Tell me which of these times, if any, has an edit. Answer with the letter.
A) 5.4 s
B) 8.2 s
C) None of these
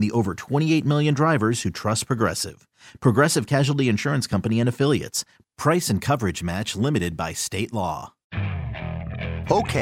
B